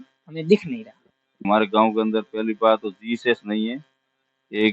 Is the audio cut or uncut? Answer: cut